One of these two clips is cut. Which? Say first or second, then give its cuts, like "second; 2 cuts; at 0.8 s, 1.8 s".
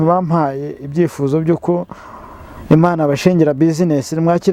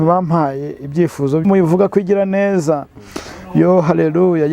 second; 1 cut; at 1.4 s